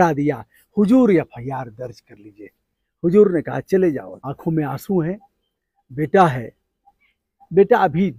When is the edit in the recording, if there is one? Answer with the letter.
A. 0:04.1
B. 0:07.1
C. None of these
A